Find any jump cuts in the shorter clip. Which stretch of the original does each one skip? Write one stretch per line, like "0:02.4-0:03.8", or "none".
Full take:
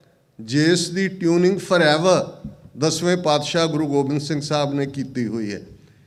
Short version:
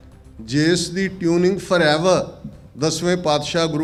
none